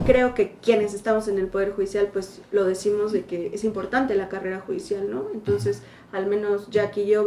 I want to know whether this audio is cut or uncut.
uncut